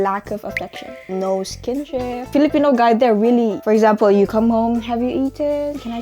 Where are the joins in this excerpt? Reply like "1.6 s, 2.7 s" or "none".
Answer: 1.1 s, 2.3 s, 3.6 s